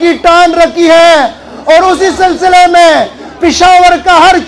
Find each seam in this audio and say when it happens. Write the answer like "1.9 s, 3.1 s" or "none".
none